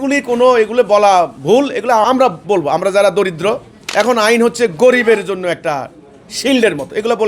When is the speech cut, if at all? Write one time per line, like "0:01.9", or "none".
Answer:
0:02.0
0:03.7